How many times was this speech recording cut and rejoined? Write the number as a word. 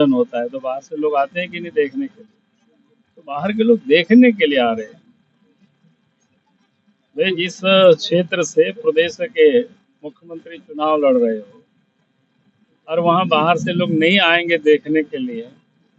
zero